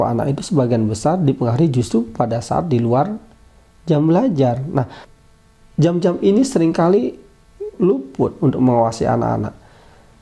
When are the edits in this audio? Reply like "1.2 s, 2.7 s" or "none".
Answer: 7.7 s

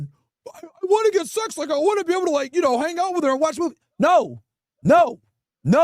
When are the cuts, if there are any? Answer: none

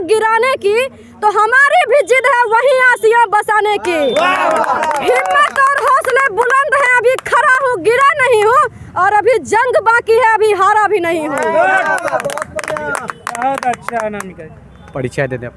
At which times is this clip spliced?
none

